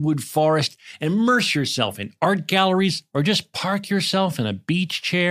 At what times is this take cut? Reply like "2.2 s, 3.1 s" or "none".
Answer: none